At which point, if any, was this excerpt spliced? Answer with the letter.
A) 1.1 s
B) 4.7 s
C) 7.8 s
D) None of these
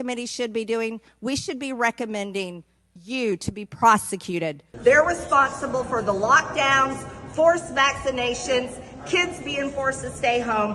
B